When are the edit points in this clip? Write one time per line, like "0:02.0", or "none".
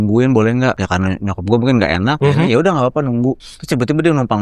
0:00.8
0:02.2
0:03.5